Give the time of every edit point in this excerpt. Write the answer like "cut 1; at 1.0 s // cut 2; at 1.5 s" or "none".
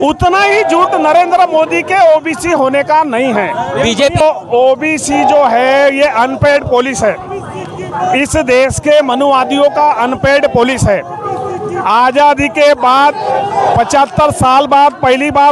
cut 1; at 4.2 s

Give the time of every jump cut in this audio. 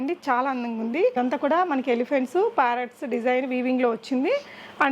cut 1; at 1.1 s

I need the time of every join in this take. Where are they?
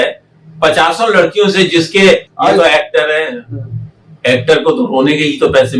cut 1; at 2.3 s

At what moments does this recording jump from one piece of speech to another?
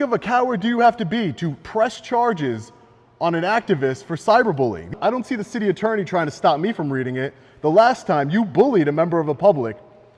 cut 1; at 4.9 s

